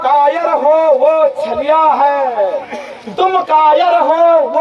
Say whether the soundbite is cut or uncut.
uncut